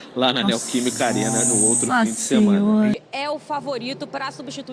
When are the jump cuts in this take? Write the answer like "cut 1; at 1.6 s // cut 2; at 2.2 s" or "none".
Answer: cut 1; at 2.9 s